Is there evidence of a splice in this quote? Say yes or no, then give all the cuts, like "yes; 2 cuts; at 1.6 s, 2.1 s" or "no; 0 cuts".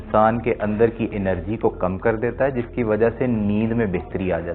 yes; 1 cut; at 1.1 s